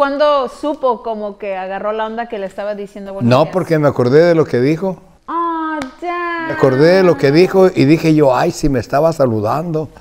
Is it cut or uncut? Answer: uncut